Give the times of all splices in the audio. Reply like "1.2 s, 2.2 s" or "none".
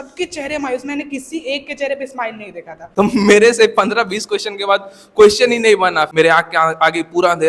2.8 s, 6.1 s